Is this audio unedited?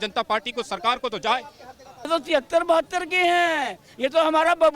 no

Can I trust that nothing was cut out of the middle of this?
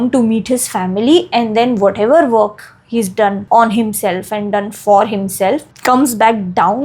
no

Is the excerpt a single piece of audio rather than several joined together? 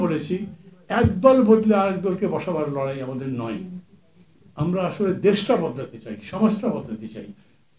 yes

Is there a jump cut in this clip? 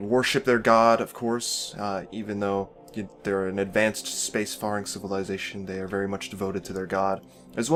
no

